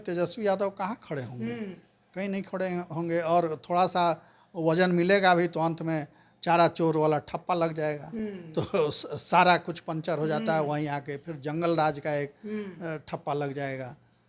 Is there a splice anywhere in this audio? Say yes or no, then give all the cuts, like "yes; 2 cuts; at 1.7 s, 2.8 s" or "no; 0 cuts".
no; 0 cuts